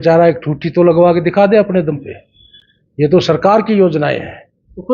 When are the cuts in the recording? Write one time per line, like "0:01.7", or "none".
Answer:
none